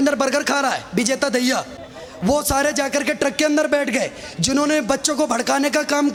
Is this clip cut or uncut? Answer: uncut